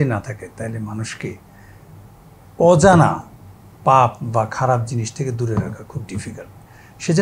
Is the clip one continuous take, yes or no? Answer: yes